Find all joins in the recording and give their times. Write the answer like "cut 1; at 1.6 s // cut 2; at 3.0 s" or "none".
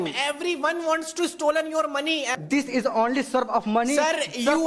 cut 1; at 2.4 s